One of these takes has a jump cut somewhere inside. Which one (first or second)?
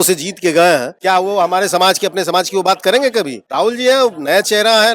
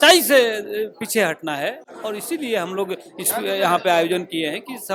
first